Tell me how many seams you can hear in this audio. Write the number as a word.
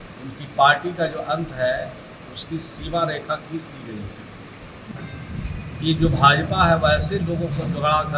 one